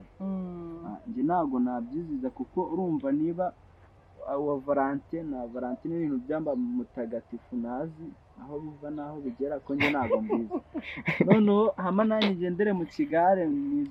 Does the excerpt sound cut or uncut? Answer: uncut